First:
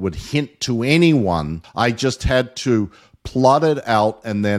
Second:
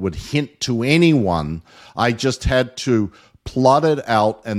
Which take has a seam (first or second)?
first